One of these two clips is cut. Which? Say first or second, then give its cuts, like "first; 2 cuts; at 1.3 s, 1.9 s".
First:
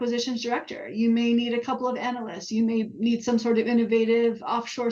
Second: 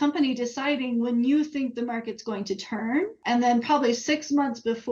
second; 1 cut; at 3.2 s